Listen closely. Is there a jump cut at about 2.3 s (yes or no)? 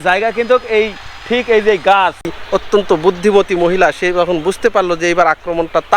yes